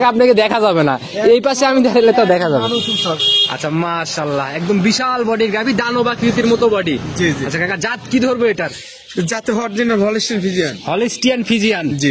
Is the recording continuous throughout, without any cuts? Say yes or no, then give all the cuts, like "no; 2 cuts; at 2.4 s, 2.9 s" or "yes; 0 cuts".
yes; 0 cuts